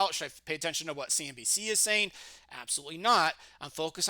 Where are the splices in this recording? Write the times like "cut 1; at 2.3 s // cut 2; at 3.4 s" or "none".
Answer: none